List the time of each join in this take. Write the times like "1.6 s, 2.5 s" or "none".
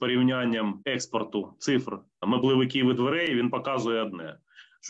0.8 s, 2.2 s